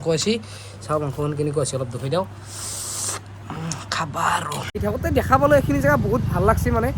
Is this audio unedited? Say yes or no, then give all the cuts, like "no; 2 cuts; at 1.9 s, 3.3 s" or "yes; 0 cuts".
no; 1 cut; at 4.8 s